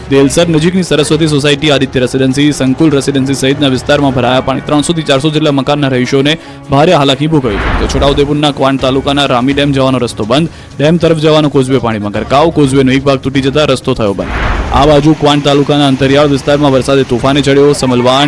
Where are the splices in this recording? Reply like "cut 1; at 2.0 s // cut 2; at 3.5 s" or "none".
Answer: cut 1; at 9.2 s